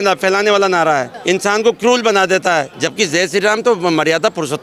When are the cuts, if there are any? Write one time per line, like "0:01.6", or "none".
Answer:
0:01.1
0:02.8